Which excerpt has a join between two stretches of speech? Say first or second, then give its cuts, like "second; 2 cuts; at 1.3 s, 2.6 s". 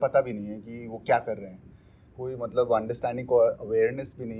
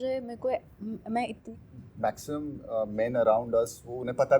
second; 1 cut; at 1.4 s